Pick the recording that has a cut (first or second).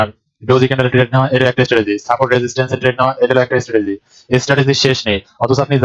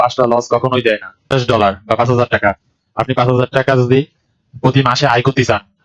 second